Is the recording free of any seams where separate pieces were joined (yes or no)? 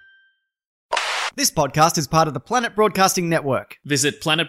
no